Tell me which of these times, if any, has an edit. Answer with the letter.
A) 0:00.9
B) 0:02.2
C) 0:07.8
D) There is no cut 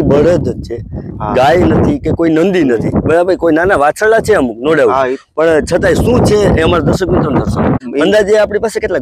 C